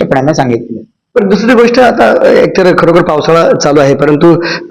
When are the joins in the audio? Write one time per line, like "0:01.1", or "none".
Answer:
none